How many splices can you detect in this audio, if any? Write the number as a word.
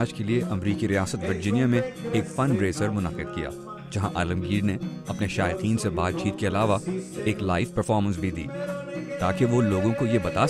one